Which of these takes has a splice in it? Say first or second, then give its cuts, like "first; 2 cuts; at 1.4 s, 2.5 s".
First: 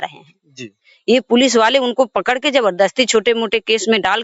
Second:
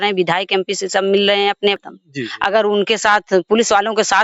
second; 1 cut; at 1.8 s